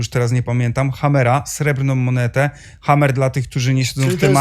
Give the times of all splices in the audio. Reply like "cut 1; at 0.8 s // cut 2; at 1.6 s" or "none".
none